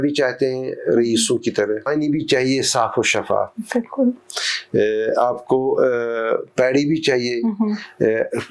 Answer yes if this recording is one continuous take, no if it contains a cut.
no